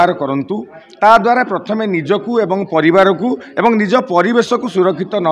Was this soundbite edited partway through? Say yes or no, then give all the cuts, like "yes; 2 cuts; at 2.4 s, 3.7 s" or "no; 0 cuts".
no; 0 cuts